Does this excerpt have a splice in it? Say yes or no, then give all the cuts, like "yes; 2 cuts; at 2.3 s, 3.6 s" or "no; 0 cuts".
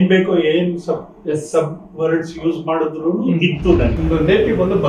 yes; 1 cut; at 4.0 s